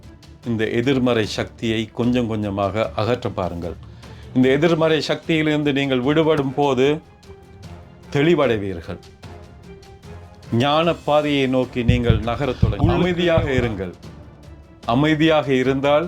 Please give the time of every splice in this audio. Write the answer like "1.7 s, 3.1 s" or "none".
13.0 s